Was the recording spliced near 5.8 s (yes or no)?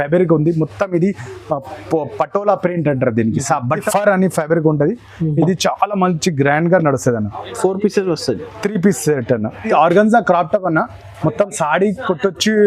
no